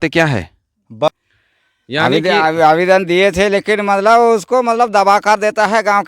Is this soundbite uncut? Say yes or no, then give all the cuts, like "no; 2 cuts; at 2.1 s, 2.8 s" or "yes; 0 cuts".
no; 1 cut; at 1.1 s